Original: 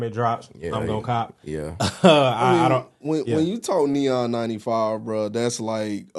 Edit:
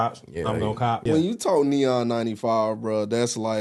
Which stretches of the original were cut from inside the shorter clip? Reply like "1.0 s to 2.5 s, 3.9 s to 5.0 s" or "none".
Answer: 1.3 s to 3.3 s

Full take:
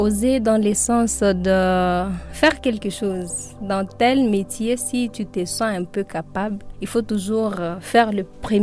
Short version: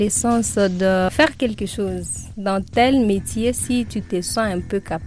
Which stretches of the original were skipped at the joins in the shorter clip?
1.7 s to 2.3 s

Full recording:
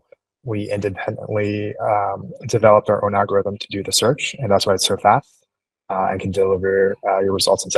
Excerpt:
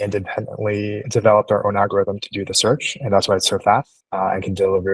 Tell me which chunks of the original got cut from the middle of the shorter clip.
1.7 s to 2.4 s, 5.4 s to 5.8 s

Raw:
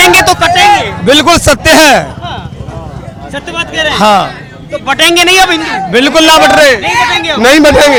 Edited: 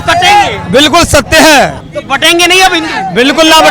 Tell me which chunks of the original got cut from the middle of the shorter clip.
2.2 s to 4.6 s

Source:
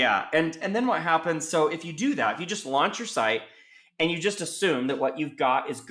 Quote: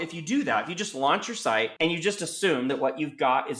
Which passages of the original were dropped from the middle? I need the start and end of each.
3.4 s to 3.9 s

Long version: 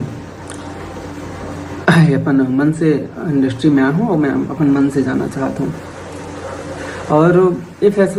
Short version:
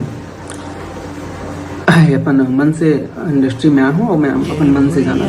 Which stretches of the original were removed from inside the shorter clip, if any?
none

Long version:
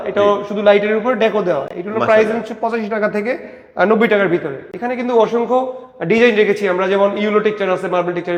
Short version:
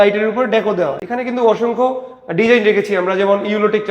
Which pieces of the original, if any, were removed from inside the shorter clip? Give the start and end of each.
1.7 s to 4.7 s

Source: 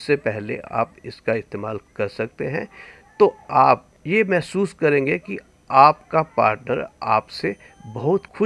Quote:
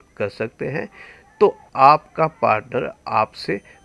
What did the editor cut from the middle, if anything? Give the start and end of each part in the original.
3.4 s to 5.6 s

